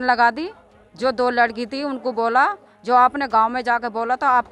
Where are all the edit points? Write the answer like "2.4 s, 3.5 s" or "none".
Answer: none